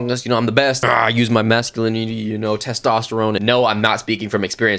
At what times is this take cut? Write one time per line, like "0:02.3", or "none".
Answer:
0:00.8
0:03.4